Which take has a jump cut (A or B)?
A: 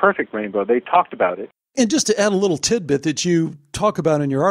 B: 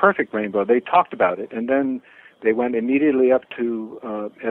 A